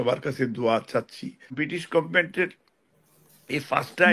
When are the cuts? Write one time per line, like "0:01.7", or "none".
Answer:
0:01.5